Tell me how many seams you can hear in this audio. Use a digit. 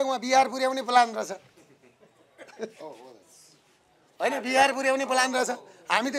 0